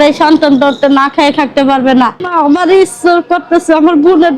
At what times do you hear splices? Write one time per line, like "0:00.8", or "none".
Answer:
0:02.2